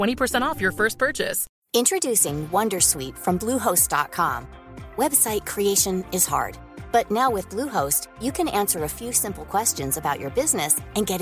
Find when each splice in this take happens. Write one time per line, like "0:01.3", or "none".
0:01.5